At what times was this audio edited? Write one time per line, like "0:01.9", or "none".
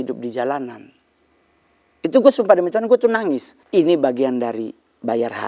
0:03.5